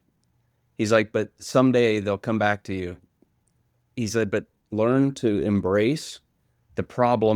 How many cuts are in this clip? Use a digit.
1